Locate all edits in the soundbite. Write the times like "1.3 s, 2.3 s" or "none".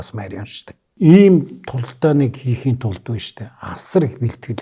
0.9 s